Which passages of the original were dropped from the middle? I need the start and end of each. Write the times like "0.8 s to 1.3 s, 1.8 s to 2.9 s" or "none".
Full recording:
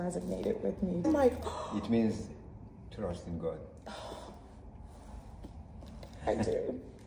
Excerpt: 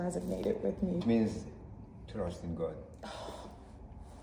1.0 s to 1.8 s